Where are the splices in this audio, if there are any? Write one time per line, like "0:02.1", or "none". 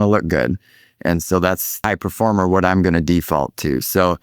0:01.8